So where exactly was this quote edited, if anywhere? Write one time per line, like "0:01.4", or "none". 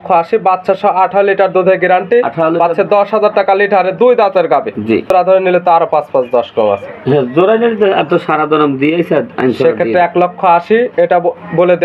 0:05.1